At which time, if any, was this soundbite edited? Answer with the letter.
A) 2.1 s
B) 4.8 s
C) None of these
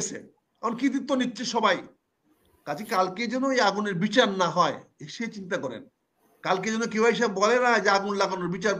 C